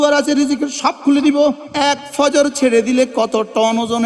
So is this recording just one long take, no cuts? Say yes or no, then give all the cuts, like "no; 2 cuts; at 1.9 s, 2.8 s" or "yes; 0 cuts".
no; 1 cut; at 1.7 s